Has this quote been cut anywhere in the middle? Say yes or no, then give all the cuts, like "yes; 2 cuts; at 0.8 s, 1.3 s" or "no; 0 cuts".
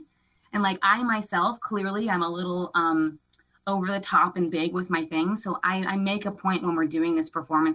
no; 0 cuts